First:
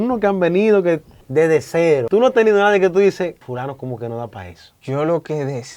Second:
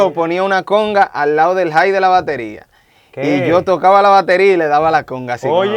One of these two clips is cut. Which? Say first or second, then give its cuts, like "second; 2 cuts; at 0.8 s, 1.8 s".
first; 4 cuts; at 1.1 s, 2.0 s, 3.4 s, 4.8 s